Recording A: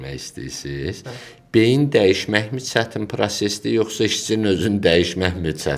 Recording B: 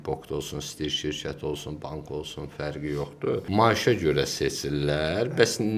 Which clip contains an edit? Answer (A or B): B